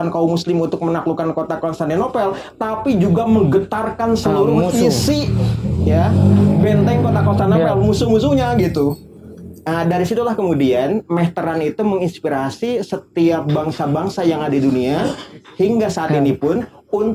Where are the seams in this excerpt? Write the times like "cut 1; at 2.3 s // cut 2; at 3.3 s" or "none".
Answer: none